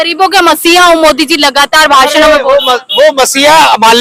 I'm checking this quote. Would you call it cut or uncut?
uncut